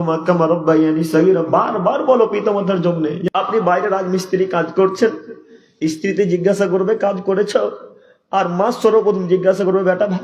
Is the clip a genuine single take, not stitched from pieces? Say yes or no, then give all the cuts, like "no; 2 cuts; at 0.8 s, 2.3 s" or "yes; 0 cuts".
no; 1 cut; at 3.2 s